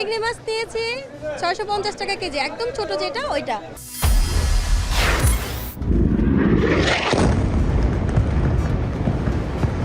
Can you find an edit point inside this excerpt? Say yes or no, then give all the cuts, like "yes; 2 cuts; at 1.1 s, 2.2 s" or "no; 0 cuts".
yes; 1 cut; at 3.8 s